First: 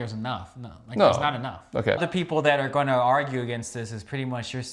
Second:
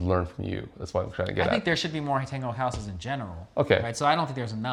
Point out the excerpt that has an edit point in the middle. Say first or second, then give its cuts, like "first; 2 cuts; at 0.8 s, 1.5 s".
first; 1 cut; at 2.1 s